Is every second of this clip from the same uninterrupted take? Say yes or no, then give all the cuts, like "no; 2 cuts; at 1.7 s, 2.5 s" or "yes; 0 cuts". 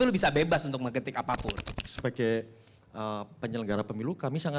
no; 1 cut; at 1.7 s